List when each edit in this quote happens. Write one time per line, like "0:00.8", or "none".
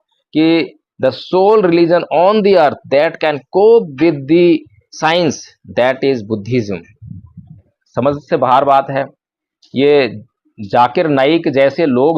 0:07.7